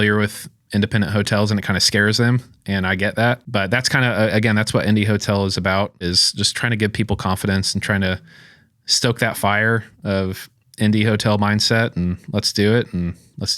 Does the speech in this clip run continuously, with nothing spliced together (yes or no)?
no